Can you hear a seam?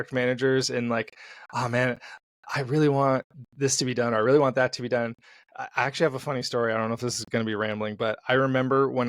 no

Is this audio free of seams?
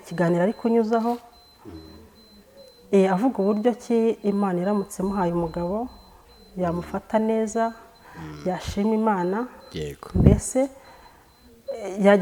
yes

